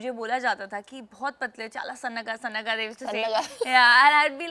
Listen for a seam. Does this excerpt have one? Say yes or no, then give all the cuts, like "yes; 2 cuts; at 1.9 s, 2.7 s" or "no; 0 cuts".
no; 0 cuts